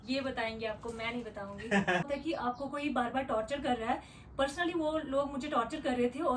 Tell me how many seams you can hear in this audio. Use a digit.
1